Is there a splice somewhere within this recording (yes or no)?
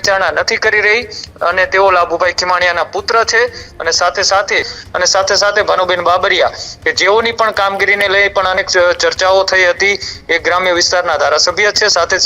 no